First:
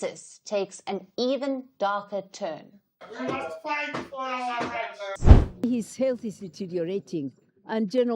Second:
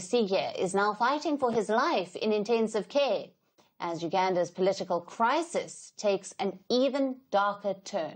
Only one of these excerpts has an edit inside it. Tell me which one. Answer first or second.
first